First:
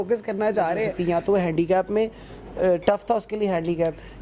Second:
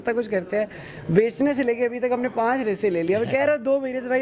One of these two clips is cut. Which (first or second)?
first